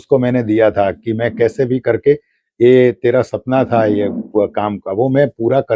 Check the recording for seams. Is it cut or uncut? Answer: uncut